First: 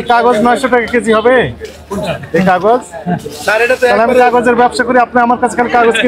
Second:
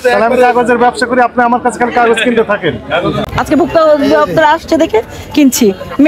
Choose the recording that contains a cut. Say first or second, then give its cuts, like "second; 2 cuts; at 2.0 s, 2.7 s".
second; 1 cut; at 3.2 s